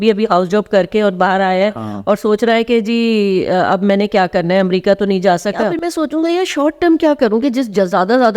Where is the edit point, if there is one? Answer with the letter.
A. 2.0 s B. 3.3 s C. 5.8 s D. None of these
C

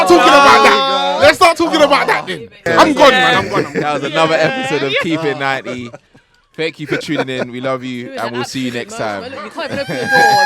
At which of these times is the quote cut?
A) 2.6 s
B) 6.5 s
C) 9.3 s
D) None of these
A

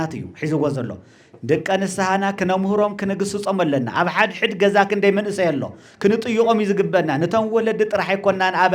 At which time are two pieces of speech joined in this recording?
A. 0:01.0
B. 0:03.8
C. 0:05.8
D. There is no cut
D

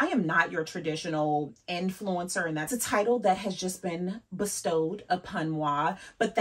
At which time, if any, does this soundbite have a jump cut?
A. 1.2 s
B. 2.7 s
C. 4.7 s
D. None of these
B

